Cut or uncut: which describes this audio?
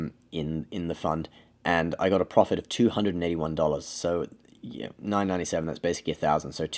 uncut